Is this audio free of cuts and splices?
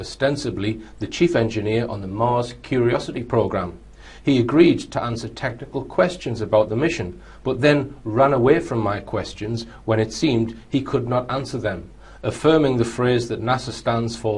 yes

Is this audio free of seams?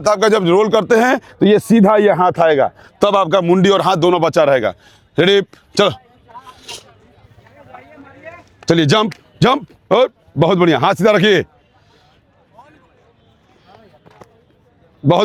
yes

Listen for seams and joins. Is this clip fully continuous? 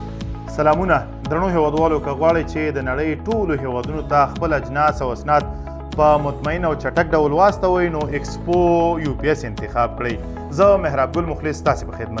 yes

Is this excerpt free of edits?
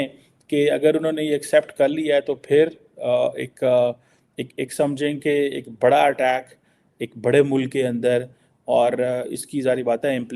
yes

